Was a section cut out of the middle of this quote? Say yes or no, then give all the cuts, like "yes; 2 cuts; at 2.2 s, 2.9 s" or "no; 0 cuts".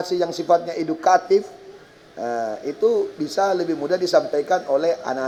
no; 0 cuts